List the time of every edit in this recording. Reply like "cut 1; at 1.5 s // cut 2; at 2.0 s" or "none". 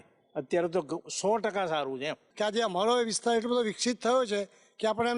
cut 1; at 2.2 s